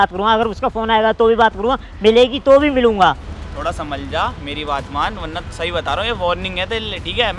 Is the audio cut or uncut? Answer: cut